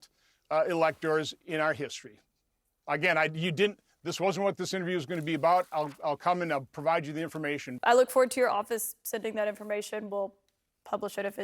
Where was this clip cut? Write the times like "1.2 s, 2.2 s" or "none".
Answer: 7.7 s